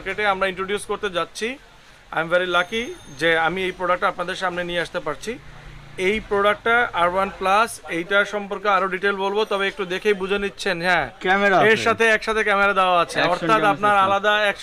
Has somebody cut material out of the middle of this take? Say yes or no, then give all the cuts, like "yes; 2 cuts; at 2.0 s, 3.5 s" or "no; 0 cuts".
no; 0 cuts